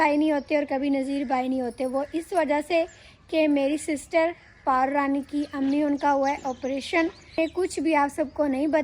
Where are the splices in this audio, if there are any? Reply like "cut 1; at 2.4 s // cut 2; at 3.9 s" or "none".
cut 1; at 7.4 s